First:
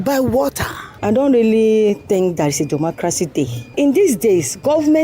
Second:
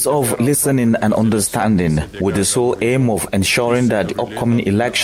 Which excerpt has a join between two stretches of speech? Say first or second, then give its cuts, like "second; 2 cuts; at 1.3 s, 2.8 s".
first; 2 cuts; at 1.0 s, 3.7 s